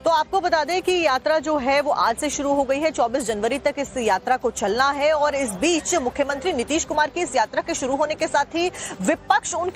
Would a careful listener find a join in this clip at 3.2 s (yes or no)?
no